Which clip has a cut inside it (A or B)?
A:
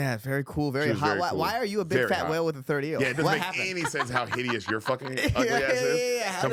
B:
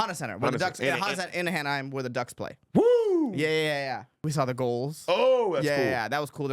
B